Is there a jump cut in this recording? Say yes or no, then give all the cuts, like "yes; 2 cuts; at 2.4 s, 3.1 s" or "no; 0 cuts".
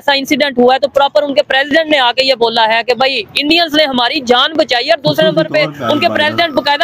no; 0 cuts